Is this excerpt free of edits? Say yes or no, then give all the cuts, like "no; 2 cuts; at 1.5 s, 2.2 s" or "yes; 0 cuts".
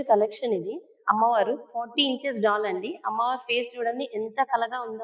yes; 0 cuts